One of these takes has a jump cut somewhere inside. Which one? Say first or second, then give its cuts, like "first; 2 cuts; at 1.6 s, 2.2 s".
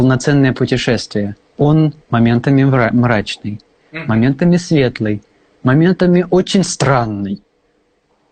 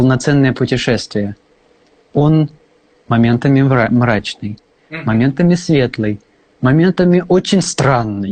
first; 2 cuts; at 1.4 s, 2.0 s